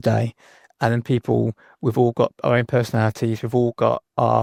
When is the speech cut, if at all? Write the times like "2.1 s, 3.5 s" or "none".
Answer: none

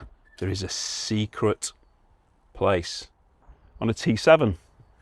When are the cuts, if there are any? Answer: 3.5 s

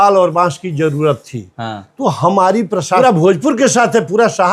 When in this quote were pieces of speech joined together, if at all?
3.0 s

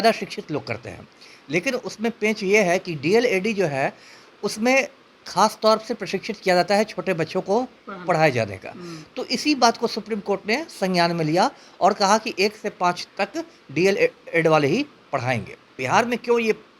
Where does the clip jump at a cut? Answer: 15.8 s

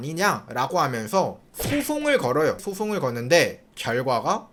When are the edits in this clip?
none

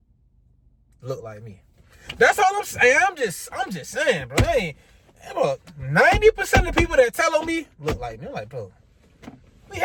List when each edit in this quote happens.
none

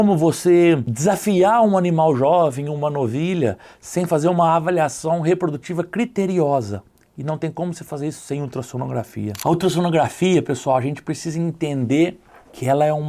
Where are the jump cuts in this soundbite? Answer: 0.9 s, 9.4 s

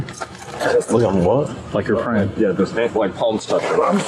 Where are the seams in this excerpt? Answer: none

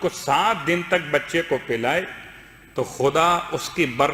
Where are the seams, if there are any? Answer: none

